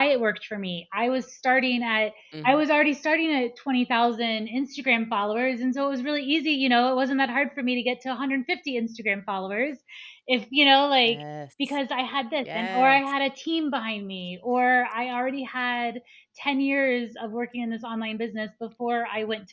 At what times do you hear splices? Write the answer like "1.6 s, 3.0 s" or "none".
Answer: 2.2 s